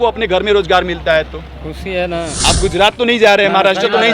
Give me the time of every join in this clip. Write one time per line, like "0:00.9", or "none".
0:02.5